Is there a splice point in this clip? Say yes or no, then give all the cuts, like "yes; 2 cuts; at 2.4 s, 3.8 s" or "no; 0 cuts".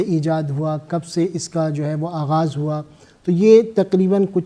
no; 0 cuts